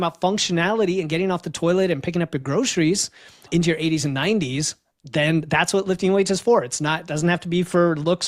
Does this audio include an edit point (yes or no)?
no